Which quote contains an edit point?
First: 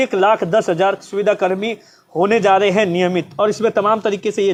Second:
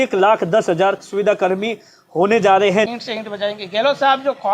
second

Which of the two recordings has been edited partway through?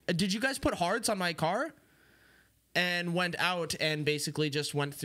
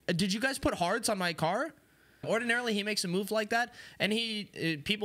second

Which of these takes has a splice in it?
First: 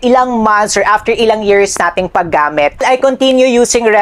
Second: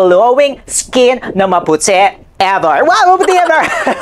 first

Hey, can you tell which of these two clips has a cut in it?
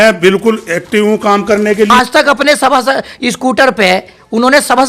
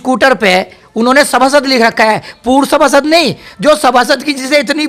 first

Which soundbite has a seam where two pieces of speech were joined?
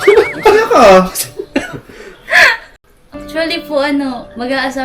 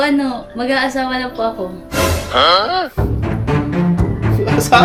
first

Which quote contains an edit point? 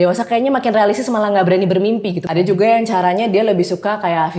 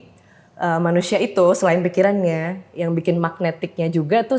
first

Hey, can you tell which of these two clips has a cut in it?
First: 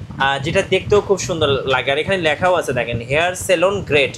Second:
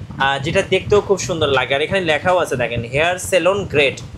second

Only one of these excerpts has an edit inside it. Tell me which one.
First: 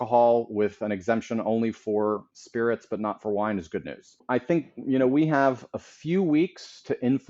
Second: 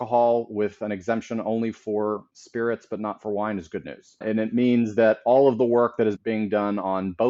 first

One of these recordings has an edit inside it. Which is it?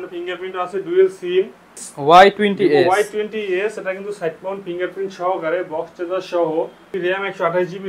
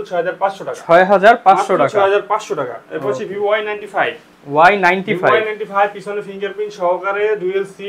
first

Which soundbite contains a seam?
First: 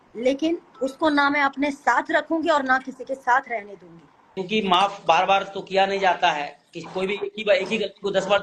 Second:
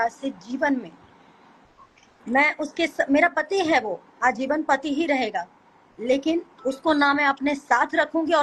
first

